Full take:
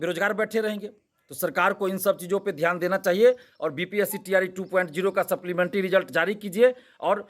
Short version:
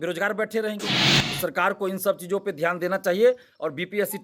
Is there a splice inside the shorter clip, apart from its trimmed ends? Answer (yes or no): no